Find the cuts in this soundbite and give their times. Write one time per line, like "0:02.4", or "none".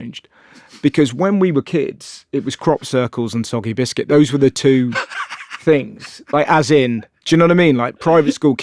none